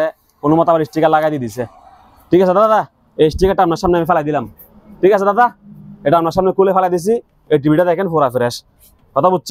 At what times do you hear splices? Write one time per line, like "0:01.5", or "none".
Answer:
none